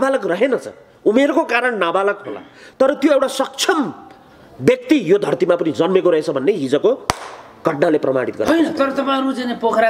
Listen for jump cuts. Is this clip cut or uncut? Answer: uncut